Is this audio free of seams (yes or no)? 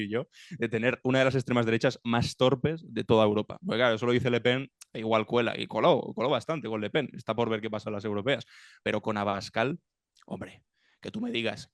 yes